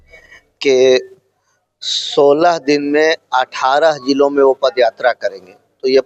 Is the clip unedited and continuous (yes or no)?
yes